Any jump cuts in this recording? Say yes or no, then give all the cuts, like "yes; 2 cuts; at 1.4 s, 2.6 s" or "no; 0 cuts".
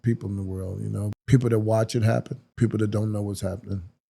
yes; 2 cuts; at 1.1 s, 2.4 s